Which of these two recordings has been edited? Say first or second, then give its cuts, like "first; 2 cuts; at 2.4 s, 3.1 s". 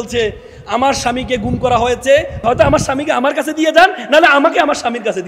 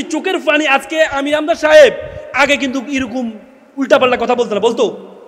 first; 1 cut; at 2.4 s